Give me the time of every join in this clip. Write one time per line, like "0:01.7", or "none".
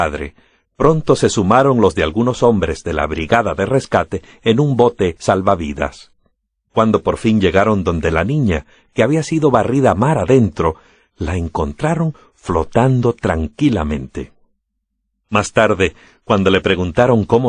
0:07.0